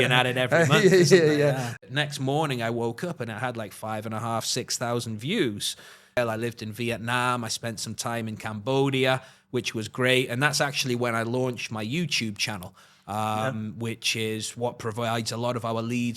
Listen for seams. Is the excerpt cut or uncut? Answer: cut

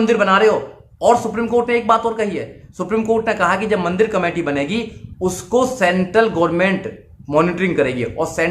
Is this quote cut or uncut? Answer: uncut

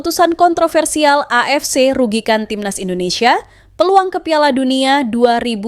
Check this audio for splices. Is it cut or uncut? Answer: uncut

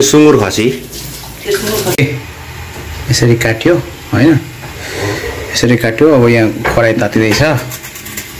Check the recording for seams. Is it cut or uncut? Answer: cut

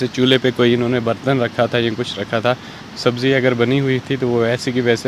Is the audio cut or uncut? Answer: uncut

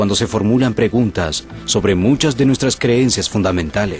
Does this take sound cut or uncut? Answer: uncut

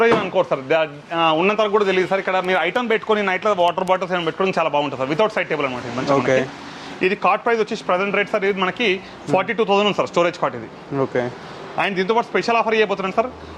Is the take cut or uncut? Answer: uncut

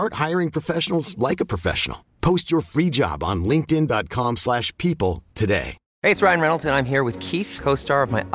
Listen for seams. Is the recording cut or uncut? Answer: cut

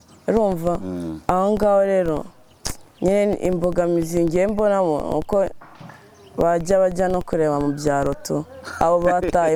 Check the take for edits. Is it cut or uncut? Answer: uncut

